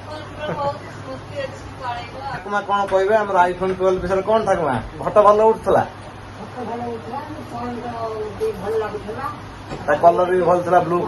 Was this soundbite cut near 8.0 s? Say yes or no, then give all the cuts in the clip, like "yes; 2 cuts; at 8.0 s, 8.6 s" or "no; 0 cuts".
no; 1 cut; at 2.4 s